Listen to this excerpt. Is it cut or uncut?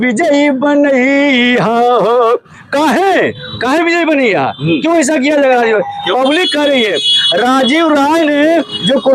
uncut